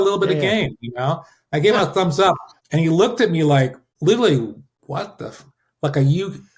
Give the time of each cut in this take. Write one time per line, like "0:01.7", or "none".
0:02.6
0:03.9
0:04.7